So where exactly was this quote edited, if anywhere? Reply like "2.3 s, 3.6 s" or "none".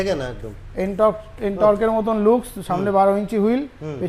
none